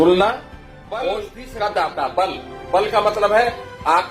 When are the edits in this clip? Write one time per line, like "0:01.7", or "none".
0:01.0